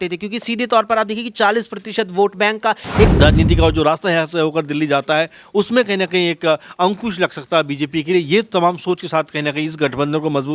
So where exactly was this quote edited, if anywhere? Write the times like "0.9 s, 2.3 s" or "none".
3.1 s